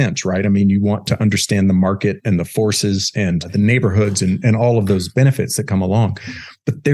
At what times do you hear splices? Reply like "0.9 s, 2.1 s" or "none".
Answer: 3.5 s